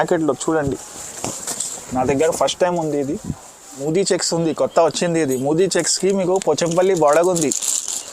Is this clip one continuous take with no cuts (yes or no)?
no